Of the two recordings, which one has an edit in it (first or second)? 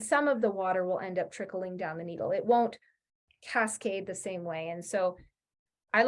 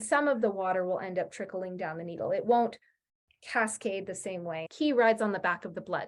second